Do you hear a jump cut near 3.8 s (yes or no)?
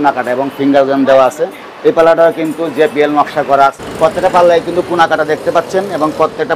yes